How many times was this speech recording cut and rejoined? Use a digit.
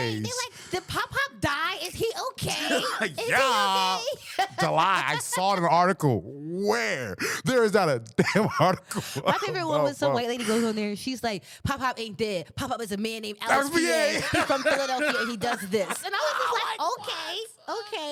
0